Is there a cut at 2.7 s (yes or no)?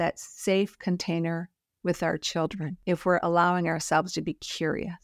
yes